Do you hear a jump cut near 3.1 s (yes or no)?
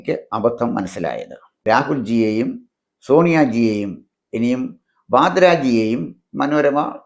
no